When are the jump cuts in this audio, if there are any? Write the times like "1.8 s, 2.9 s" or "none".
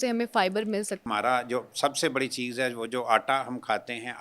1.0 s